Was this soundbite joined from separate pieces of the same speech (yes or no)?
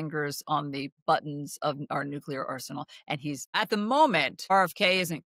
yes